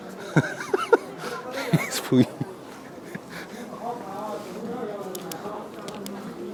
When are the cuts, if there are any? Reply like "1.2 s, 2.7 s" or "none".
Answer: none